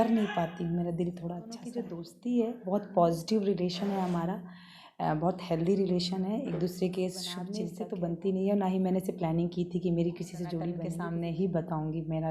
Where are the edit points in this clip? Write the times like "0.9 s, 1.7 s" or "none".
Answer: 1.8 s, 7.7 s, 10.9 s